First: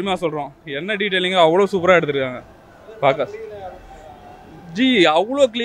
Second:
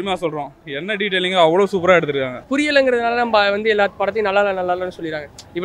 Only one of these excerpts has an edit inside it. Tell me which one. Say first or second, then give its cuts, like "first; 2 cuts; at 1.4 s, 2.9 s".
second; 1 cut; at 2.4 s